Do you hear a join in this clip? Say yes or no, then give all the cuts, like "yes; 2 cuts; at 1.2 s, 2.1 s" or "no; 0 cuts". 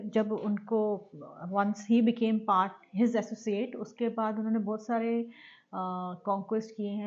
no; 0 cuts